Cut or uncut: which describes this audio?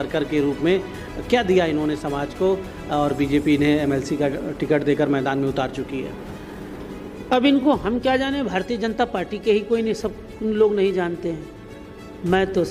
uncut